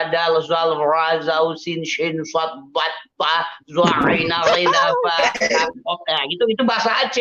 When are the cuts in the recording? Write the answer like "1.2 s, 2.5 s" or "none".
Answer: none